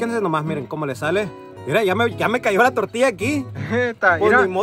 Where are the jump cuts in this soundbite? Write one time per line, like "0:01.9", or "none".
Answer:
none